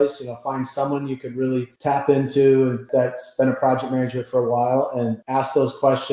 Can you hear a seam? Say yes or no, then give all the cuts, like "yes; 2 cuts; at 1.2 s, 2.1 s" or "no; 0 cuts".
yes; 3 cuts; at 1.7 s, 2.8 s, 5.2 s